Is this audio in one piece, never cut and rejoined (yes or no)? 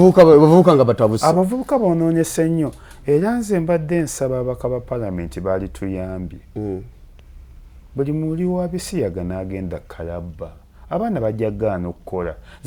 yes